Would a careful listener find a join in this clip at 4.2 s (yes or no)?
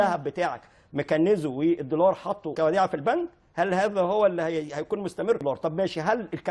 no